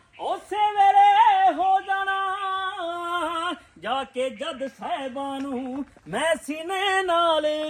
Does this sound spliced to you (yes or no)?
no